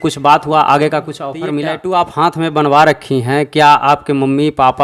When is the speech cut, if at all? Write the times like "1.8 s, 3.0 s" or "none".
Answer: 1.8 s